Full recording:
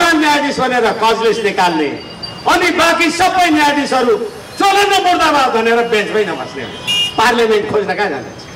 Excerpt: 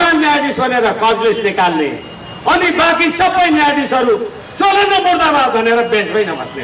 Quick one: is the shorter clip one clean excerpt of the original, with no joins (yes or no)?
yes